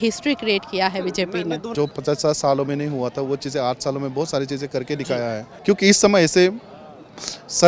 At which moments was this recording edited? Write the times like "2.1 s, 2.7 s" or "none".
1.9 s, 5.5 s